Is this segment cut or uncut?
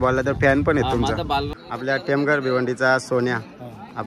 cut